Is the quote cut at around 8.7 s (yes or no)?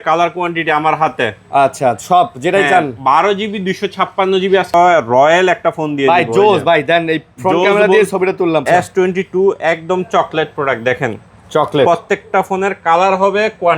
yes